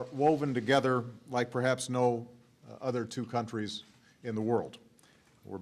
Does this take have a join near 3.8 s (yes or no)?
no